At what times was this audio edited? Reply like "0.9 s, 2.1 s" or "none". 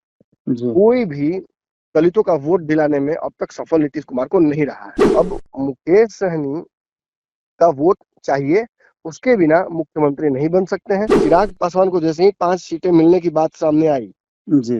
4.9 s, 11.1 s